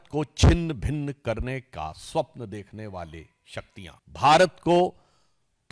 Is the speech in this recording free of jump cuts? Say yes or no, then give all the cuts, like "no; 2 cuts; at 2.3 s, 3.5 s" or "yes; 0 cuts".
no; 1 cut; at 4.0 s